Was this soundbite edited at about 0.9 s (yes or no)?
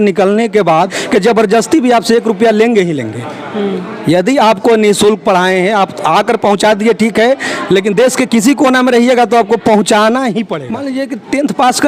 yes